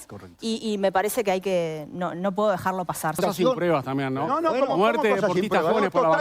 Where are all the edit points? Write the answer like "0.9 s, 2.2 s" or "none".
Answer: 3.2 s